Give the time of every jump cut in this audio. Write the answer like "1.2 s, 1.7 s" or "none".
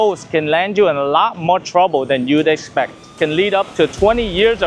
3.1 s